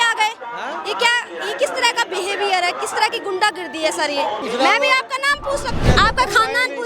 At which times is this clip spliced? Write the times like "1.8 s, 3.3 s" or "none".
4.4 s, 5.8 s